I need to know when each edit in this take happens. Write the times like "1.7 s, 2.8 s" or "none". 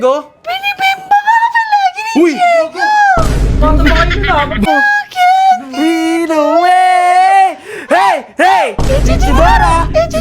4.7 s